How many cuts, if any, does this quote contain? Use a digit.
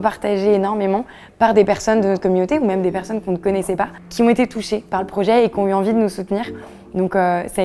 1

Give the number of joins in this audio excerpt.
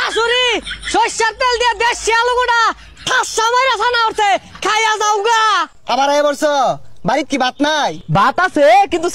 2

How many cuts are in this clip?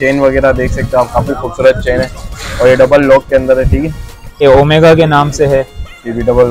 1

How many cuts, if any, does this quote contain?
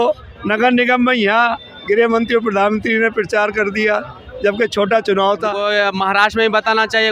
1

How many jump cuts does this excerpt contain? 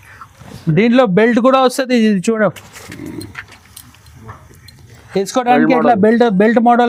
0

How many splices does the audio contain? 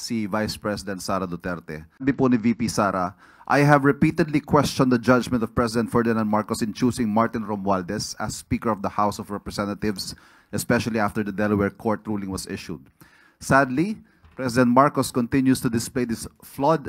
1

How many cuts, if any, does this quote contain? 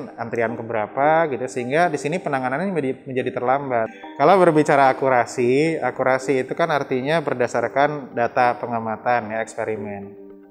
1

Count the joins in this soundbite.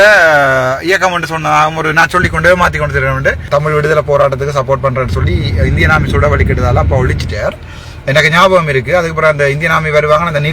1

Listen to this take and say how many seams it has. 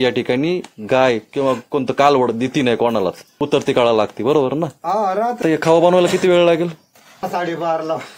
3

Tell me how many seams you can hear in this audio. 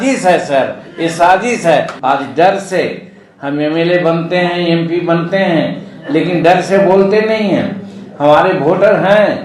1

